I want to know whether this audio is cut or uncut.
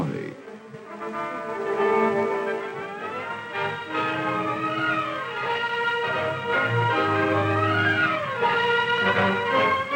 uncut